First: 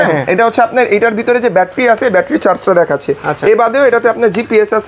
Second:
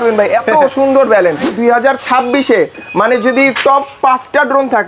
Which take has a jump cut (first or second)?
second